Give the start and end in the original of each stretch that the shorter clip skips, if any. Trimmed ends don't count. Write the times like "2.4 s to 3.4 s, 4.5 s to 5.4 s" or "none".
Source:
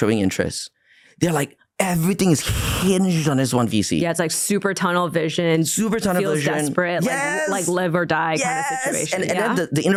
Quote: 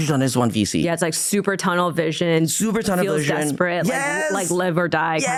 none